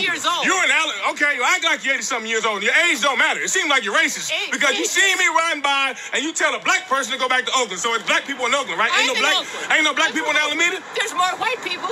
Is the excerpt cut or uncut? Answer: uncut